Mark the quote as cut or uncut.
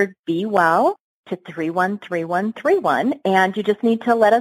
uncut